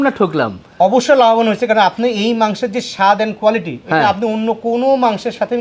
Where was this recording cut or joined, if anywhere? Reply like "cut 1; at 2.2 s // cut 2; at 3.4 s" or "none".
none